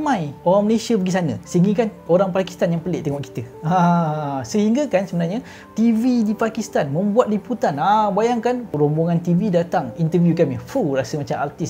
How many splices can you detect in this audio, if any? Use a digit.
2